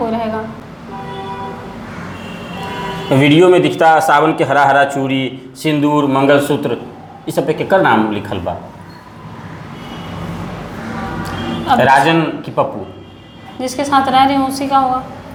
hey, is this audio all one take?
yes; 0 cuts

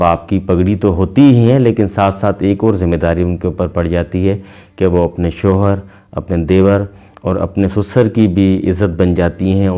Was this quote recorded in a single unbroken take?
yes; 0 cuts

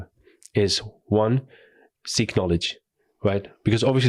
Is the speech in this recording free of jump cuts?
yes; 0 cuts

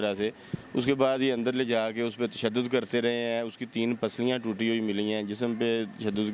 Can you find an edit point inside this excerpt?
no; 0 cuts

